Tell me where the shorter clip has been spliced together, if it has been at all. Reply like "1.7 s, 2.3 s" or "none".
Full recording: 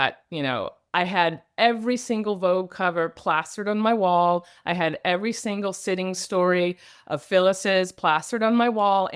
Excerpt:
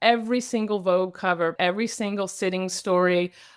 1.5 s